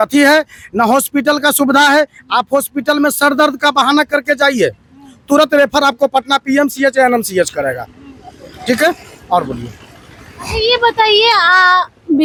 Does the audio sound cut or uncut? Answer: uncut